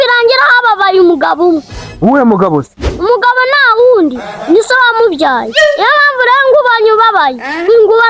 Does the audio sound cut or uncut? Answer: uncut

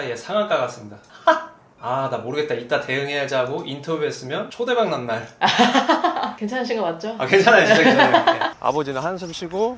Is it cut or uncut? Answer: cut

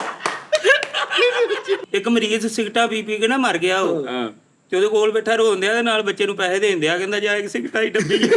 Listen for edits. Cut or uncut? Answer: cut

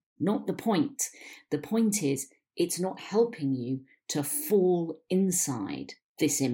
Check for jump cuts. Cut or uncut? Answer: uncut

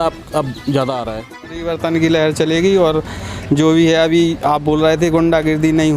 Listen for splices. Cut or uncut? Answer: cut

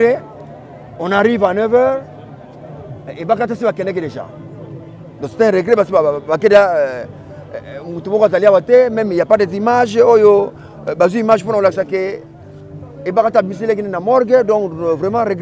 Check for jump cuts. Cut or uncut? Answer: uncut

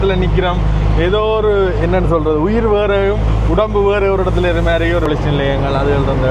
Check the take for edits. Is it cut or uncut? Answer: cut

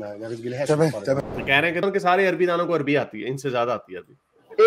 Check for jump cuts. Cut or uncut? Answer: cut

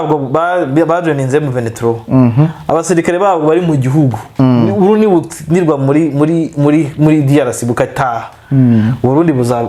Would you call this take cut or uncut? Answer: uncut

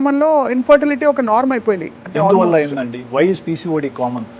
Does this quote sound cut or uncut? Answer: cut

